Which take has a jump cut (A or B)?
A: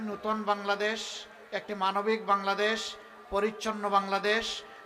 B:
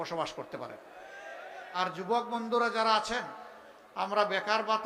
B